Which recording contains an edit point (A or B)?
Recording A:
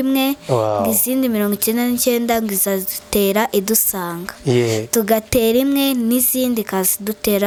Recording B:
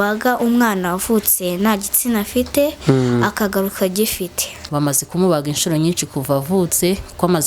B